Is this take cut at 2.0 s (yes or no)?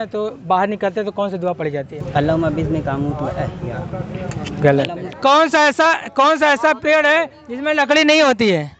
yes